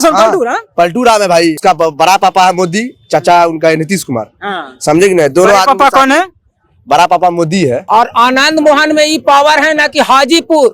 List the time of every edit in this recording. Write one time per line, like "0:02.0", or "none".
0:01.6
0:07.8

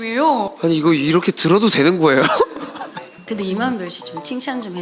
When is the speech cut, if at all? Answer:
0:03.1

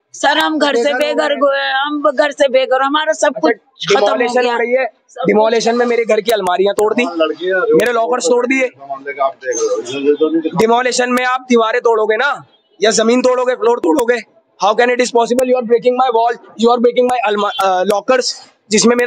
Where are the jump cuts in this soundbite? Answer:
none

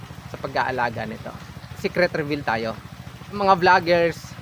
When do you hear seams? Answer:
0:01.6
0:03.4

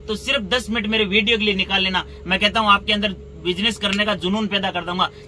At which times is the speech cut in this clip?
none

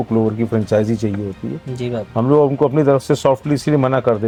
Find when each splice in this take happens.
none

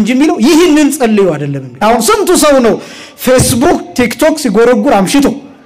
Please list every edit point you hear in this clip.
0:01.7

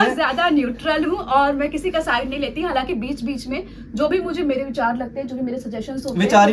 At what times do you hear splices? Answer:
none

